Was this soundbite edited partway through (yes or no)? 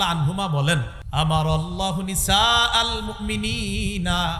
yes